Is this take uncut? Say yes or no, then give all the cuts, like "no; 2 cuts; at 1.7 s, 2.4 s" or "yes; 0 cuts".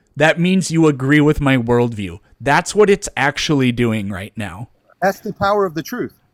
yes; 0 cuts